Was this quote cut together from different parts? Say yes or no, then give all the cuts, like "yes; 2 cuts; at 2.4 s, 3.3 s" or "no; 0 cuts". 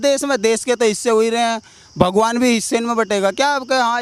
no; 0 cuts